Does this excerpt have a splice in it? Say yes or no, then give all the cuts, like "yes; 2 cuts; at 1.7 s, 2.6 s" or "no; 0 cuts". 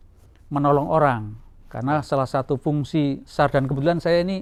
no; 0 cuts